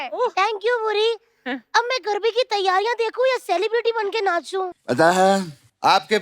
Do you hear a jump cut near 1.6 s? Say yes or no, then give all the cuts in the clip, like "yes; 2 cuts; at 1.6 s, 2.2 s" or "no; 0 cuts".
no; 1 cut; at 4.7 s